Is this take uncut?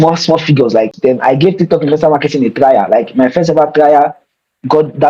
no; 1 cut; at 0.9 s

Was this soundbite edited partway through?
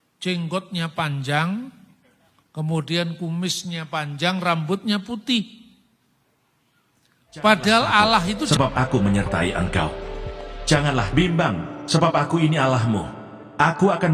yes; 1 cut; at 8.4 s

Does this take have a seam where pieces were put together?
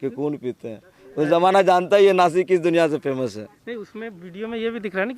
no; 0 cuts

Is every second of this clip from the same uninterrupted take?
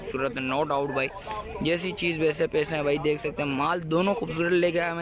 yes; 0 cuts

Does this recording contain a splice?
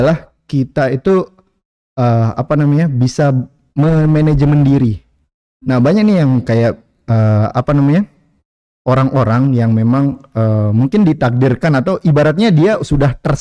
no; 0 cuts

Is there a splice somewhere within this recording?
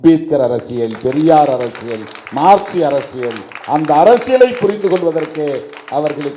no; 0 cuts

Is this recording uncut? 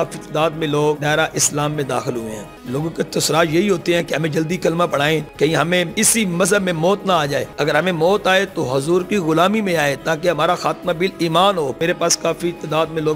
no; 6 cuts; at 1.0 s, 2.5 s, 5.3 s, 5.9 s, 7.5 s, 11.7 s

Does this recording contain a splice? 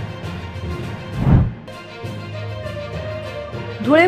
yes; 1 cut; at 1.1 s

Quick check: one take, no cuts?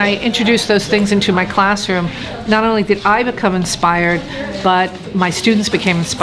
yes; 0 cuts

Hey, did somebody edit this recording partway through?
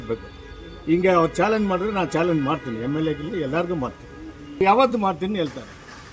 yes; 1 cut; at 4.6 s

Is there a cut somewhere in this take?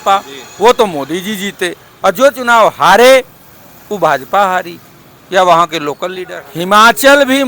yes; 1 cut; at 6.3 s

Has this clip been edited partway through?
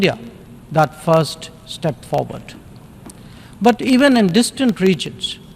no; 0 cuts

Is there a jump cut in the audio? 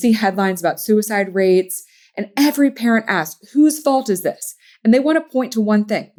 no; 0 cuts

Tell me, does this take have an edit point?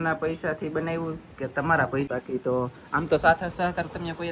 yes; 1 cut; at 2.1 s

